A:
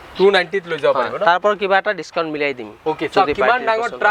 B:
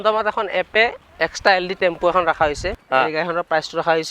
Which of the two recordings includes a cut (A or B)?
B